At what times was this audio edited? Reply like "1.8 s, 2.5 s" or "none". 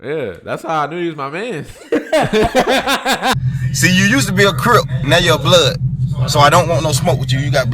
3.4 s